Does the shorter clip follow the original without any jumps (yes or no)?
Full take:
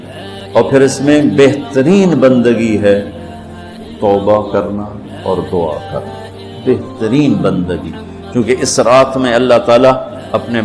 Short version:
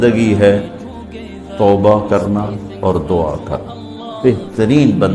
yes